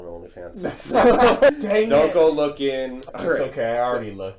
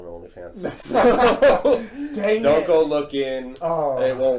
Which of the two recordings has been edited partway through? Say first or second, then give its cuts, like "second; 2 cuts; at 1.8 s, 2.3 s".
first; 2 cuts; at 1.5 s, 3.0 s